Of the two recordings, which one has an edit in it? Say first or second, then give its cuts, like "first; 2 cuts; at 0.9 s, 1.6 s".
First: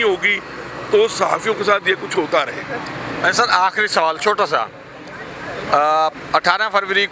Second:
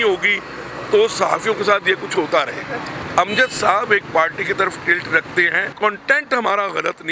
second; 2 cuts; at 3.0 s, 5.7 s